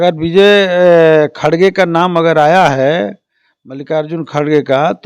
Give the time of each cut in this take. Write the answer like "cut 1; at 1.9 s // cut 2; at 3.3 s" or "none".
none